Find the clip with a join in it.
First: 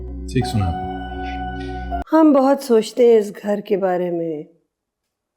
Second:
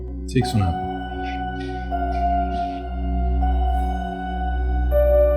first; 1 cut; at 2.0 s

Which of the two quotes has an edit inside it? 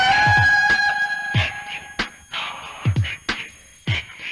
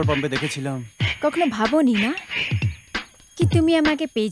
first; 1 cut; at 1.1 s

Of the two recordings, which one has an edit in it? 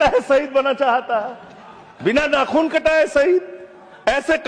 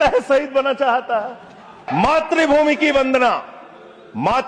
second; 1 cut; at 2.1 s

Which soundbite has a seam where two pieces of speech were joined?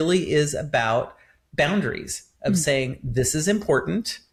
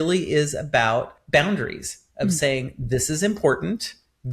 second; 1 cut; at 1.2 s

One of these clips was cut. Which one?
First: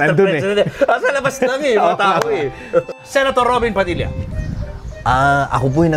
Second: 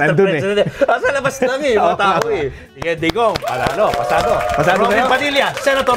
first; 1 cut; at 3.0 s

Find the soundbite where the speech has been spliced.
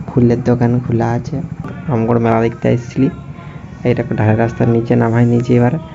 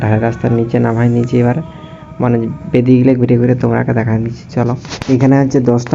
first; 1 cut; at 1.8 s

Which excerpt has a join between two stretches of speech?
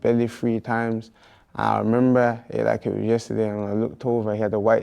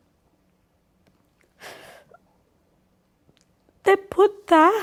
first; 1 cut; at 3.4 s

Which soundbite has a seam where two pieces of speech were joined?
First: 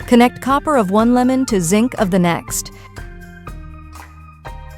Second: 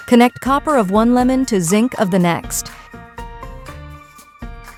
first; 1 cut; at 2.4 s

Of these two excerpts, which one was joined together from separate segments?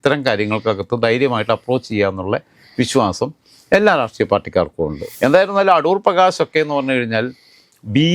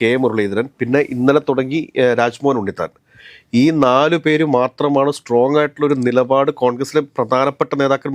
first; 1 cut; at 5.0 s

